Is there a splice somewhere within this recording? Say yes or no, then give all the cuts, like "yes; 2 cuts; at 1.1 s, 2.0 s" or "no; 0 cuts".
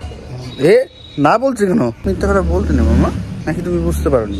yes; 2 cuts; at 2.0 s, 3.3 s